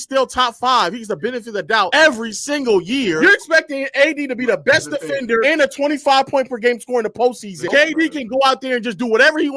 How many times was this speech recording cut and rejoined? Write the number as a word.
zero